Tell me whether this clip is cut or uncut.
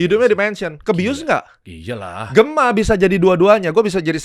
uncut